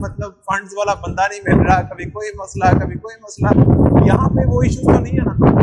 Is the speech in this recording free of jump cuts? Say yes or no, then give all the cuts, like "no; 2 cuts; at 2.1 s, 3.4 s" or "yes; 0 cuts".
yes; 0 cuts